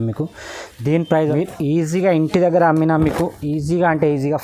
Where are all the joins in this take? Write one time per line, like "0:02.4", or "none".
0:01.2